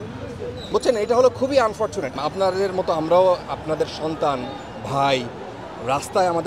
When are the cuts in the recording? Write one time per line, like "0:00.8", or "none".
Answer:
0:02.2